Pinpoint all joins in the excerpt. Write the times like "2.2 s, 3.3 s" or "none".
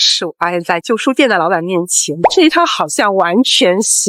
none